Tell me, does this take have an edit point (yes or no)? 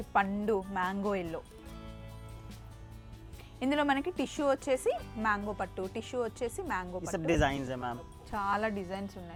no